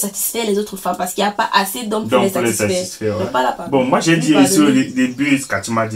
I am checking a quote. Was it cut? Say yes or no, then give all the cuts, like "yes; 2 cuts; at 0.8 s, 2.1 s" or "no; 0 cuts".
yes; 1 cut; at 3.4 s